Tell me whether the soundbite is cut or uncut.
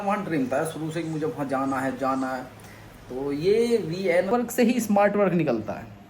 cut